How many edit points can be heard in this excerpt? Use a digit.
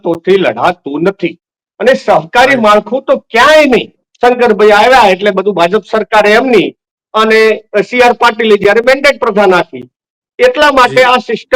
1